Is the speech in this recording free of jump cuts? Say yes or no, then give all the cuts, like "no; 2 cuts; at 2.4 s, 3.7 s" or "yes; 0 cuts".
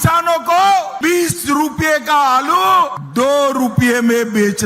no; 2 cuts; at 0.9 s, 3.0 s